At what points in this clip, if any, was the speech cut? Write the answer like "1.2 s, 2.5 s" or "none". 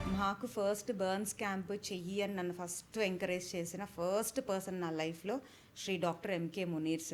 none